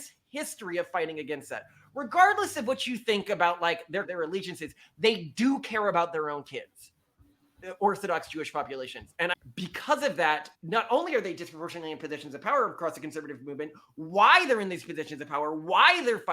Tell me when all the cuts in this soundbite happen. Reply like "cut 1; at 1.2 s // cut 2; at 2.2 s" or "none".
cut 1; at 4.1 s // cut 2; at 9.3 s // cut 3; at 10.5 s